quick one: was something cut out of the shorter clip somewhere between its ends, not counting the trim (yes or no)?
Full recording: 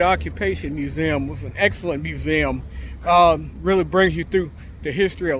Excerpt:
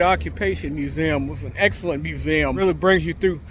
yes